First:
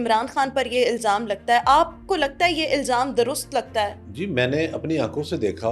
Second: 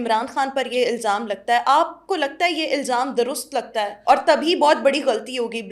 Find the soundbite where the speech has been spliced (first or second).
first